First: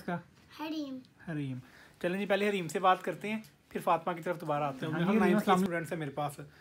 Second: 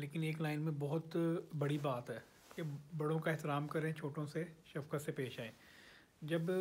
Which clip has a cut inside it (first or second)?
first